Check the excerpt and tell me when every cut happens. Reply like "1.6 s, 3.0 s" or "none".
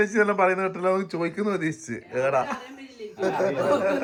none

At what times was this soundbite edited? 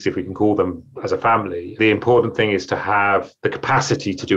none

